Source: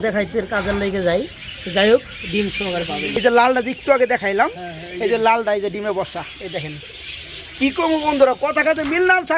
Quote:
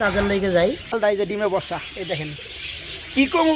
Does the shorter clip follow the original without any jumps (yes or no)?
no